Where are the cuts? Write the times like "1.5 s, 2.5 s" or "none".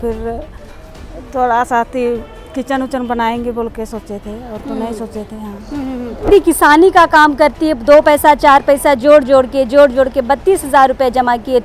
6.3 s